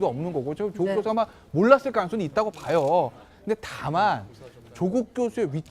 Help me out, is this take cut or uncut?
cut